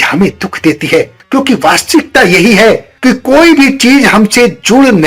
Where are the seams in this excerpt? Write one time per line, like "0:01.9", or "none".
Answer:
0:01.2